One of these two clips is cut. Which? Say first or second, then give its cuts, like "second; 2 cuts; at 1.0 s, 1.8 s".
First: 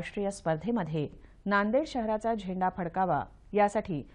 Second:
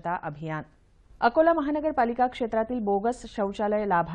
first; 1 cut; at 1.2 s